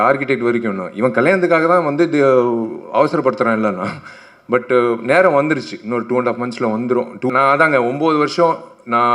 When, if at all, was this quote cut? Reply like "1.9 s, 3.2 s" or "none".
7.3 s